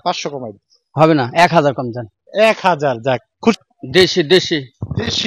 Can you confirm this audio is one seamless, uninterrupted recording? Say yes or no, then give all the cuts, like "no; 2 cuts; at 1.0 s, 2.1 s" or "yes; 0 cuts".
no; 1 cut; at 3.5 s